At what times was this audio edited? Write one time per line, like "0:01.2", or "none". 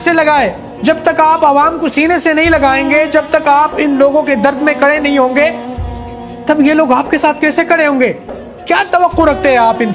0:08.8